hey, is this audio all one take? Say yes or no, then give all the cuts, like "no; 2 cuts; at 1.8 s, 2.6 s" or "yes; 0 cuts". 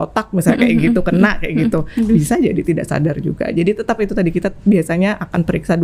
yes; 0 cuts